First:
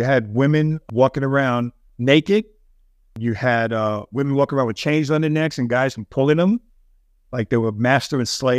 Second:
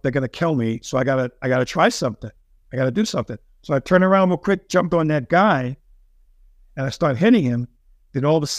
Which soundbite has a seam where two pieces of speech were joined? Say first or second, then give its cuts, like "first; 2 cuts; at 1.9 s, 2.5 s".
first; 3 cuts; at 0.8 s, 1.9 s, 3.1 s